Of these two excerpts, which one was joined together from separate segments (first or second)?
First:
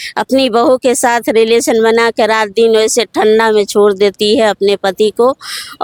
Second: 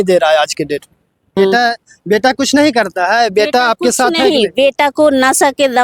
second